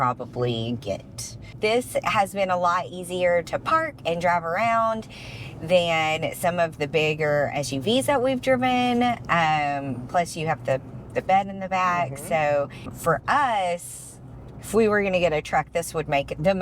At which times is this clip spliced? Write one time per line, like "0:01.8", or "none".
0:01.4
0:12.9